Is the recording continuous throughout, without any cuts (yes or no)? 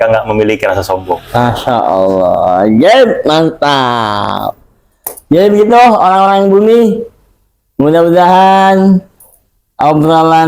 yes